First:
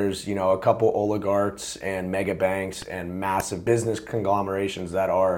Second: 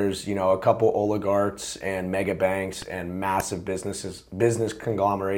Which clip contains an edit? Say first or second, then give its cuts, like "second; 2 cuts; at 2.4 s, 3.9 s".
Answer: first; 1 cut; at 3.5 s